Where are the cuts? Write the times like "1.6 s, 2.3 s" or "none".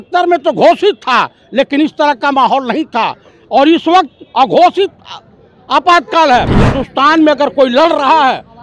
6.5 s